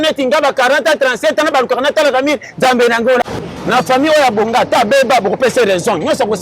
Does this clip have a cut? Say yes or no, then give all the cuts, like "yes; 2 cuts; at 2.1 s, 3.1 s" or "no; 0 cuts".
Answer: yes; 1 cut; at 3.3 s